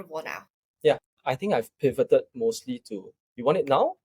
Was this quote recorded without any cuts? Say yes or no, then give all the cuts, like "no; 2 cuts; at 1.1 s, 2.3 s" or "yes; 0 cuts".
no; 1 cut; at 1.1 s